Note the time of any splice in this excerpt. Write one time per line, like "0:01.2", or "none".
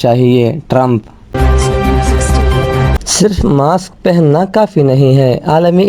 0:01.3
0:03.0